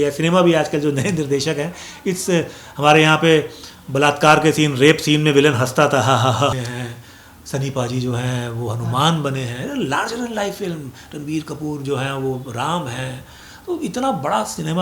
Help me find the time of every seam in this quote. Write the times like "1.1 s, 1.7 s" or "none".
6.5 s